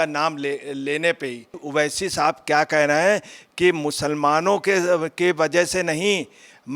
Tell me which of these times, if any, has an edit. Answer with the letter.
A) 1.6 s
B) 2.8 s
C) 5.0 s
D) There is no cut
A